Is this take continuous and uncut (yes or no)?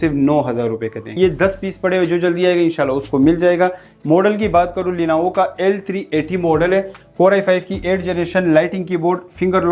no